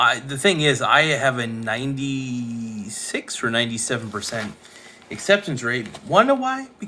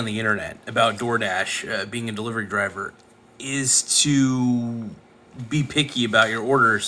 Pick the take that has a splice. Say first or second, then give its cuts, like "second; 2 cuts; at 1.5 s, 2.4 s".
first; 1 cut; at 5.9 s